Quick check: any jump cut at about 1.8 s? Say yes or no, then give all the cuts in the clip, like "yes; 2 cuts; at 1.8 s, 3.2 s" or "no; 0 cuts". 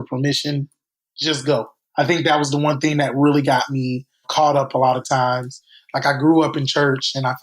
yes; 1 cut; at 1.8 s